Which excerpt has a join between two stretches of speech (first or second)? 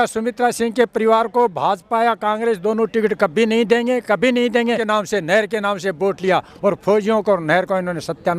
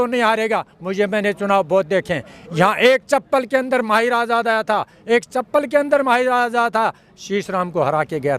first